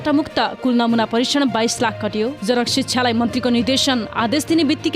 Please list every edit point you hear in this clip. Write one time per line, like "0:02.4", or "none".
0:02.3